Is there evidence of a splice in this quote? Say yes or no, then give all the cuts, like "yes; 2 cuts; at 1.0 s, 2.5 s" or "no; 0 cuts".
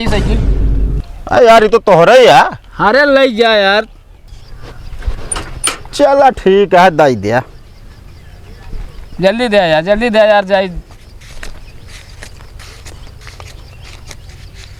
yes; 1 cut; at 4.1 s